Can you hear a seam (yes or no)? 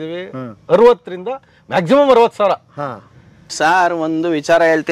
yes